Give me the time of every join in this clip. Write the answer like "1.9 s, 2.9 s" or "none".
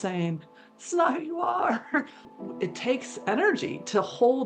2.3 s